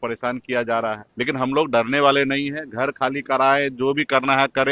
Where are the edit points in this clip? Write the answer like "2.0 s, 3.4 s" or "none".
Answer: 1.1 s

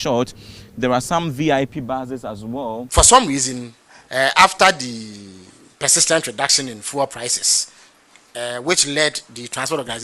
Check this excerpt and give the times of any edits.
2.8 s

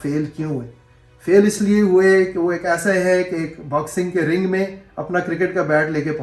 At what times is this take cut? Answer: none

